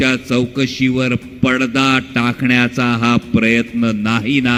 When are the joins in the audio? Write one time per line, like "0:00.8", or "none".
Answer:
none